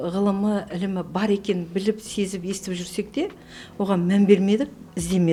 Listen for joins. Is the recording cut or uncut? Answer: uncut